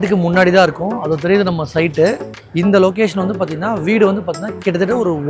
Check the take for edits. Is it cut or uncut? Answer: uncut